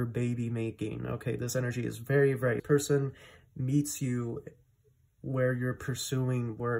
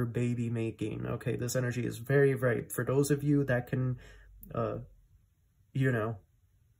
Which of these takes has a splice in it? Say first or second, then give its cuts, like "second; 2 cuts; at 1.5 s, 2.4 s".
first; 1 cut; at 2.6 s